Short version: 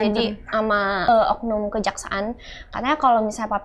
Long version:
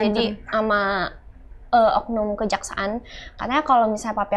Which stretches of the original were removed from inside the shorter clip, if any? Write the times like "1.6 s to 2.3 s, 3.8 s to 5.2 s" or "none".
1.0 s to 1.7 s